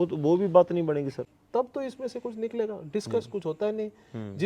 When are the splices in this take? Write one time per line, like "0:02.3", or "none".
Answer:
0:01.1